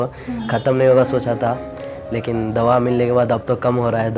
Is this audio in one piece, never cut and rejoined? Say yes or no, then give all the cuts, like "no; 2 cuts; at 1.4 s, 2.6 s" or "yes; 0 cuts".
yes; 0 cuts